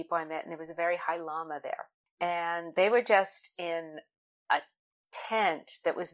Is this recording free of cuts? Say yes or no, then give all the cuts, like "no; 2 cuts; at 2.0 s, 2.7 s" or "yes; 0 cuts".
no; 1 cut; at 2.0 s